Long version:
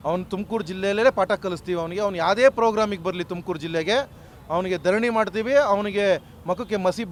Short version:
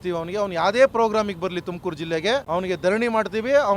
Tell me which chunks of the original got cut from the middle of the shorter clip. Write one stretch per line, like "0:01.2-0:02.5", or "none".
0:04.1-0:04.5